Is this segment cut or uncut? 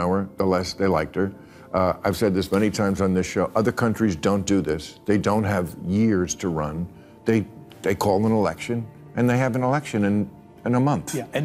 uncut